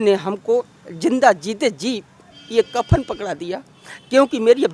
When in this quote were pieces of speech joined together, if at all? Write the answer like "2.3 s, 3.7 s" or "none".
none